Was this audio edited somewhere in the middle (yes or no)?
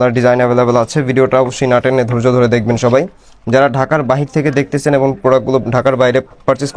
no